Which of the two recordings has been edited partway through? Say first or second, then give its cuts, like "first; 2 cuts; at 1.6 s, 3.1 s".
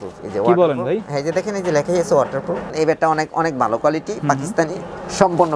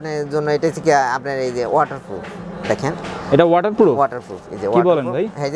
first; 1 cut; at 2.7 s